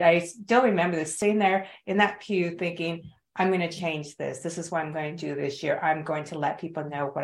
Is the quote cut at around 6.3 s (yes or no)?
no